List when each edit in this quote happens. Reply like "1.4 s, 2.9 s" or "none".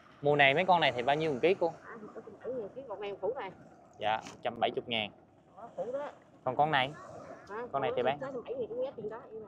none